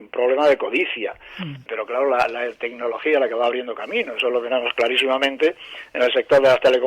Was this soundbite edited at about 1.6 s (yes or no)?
yes